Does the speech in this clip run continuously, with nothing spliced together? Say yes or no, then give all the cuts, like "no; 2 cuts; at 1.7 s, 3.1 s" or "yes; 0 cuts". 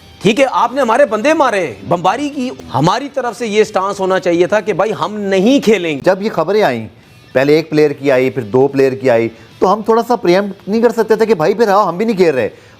yes; 0 cuts